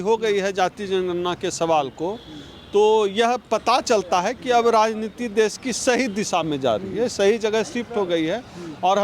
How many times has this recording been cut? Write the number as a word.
zero